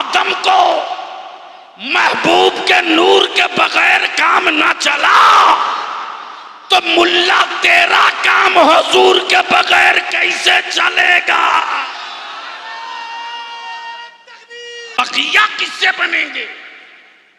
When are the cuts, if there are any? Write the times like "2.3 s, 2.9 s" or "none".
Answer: 15.0 s